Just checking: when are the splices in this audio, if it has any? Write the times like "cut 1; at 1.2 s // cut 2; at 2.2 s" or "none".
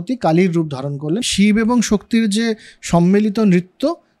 cut 1; at 1.2 s